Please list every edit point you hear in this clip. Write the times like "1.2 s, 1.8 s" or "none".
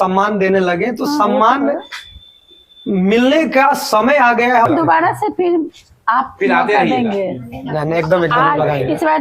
4.7 s